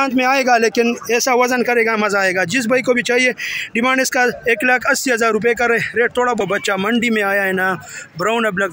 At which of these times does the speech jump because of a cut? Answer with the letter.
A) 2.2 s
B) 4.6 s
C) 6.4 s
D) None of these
C